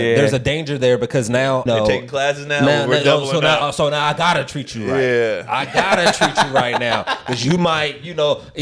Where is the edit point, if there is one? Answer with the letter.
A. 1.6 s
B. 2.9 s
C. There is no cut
A